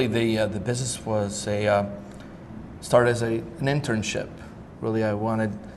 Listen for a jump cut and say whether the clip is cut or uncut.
cut